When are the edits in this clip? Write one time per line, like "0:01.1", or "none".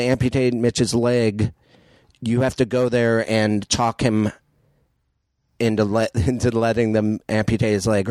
none